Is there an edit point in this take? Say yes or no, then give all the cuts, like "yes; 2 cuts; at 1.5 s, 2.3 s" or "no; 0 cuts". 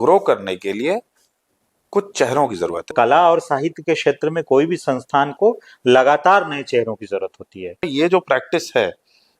yes; 2 cuts; at 2.9 s, 7.9 s